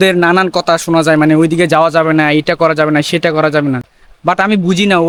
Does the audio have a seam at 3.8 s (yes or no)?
no